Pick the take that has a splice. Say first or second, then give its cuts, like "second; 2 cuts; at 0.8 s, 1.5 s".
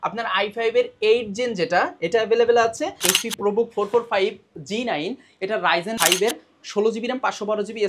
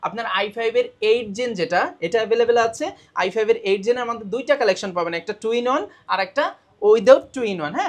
first; 2 cuts; at 3.0 s, 6.0 s